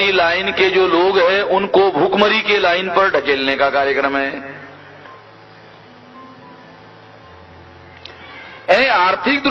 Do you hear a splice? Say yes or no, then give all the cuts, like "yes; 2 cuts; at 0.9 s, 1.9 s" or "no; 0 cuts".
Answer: no; 0 cuts